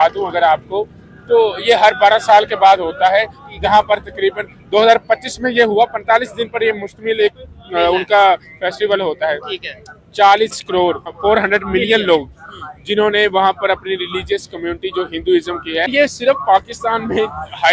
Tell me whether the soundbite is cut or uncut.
cut